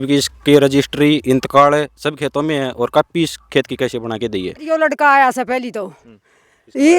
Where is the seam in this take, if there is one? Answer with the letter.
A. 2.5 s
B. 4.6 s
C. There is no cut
B